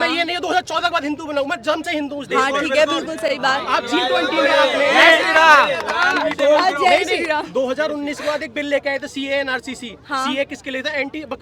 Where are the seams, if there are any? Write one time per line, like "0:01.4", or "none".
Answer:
none